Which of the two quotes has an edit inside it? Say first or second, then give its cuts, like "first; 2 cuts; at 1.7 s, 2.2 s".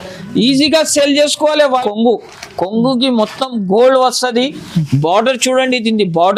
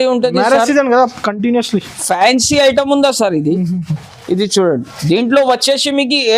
first; 1 cut; at 1.8 s